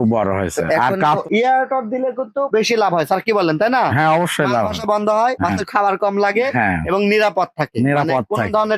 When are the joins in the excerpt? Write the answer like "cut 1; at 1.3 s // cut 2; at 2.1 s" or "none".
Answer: cut 1; at 1.2 s